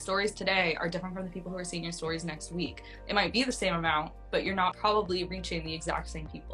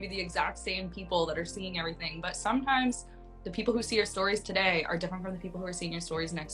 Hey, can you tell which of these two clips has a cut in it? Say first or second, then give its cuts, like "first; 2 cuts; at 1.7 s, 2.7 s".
first; 1 cut; at 4.8 s